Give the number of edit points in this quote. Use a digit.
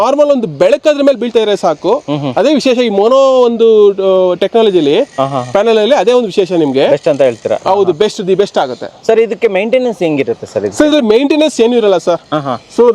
0